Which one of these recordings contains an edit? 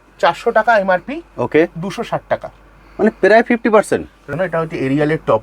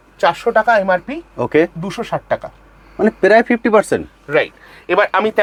first; 1 cut; at 4.2 s

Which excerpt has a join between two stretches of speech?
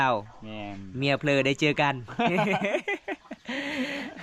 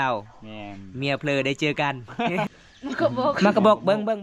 second; 1 cut; at 2.5 s

